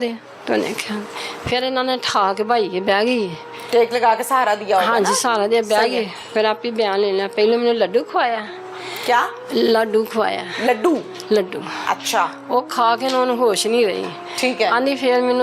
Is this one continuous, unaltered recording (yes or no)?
yes